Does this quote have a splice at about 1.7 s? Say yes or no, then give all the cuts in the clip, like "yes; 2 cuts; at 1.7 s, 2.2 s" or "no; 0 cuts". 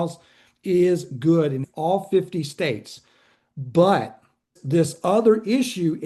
yes; 2 cuts; at 1.7 s, 4.6 s